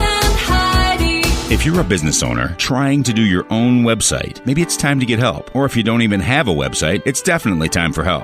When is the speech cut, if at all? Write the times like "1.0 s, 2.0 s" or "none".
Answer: 1.4 s